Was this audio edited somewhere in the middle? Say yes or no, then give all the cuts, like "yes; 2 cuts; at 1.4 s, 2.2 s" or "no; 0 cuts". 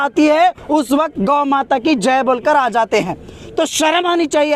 no; 0 cuts